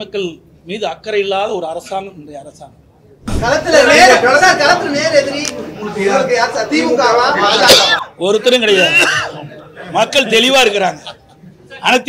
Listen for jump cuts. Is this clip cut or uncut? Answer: cut